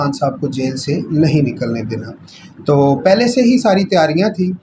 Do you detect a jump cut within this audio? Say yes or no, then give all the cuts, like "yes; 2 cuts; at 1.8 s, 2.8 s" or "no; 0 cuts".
no; 0 cuts